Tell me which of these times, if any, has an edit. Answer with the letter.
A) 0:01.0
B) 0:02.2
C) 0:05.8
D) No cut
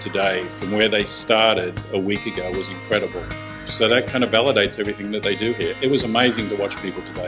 C